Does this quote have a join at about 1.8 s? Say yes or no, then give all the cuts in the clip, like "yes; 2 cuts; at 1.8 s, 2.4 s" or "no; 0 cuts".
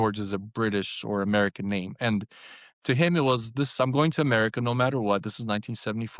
no; 0 cuts